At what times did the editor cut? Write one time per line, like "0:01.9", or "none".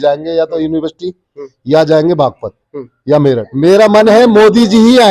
0:03.5